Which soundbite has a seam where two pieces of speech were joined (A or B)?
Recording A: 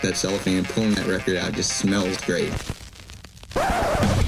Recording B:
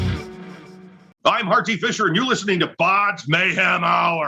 B